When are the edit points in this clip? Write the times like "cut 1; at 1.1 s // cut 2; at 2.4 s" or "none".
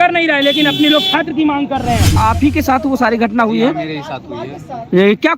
cut 1; at 2.2 s